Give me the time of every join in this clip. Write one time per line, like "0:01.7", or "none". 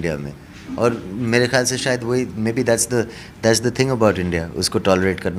none